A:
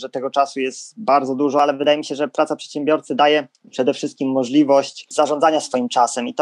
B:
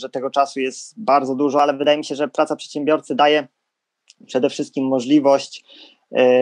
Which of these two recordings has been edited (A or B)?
A